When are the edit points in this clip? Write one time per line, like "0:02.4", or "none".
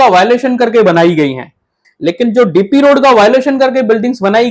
0:01.8